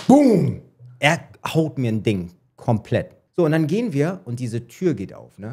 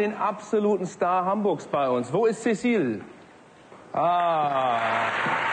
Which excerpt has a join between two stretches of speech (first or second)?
first